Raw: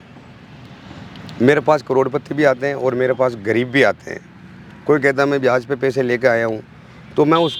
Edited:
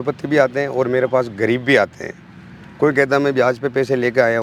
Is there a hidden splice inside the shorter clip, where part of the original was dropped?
no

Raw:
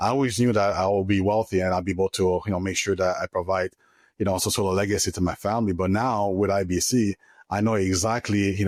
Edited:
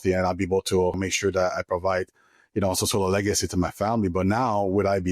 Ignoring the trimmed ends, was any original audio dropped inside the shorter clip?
yes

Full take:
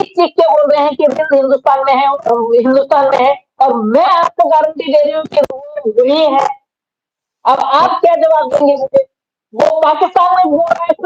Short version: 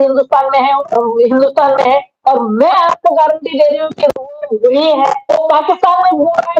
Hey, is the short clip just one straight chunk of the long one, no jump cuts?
no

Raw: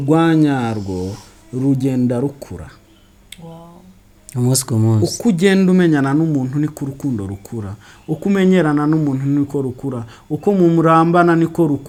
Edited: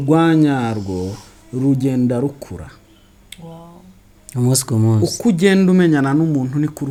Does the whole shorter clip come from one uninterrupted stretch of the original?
yes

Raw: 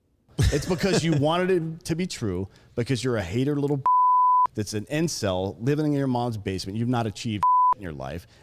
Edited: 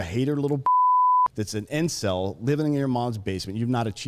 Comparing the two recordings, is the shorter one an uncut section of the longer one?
yes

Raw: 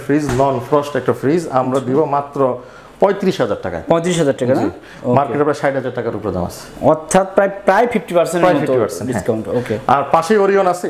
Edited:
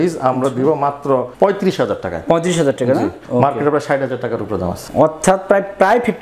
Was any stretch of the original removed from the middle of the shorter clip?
yes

